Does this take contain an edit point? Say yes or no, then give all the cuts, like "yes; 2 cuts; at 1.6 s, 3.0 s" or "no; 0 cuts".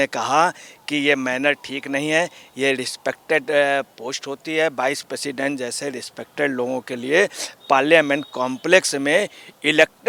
no; 0 cuts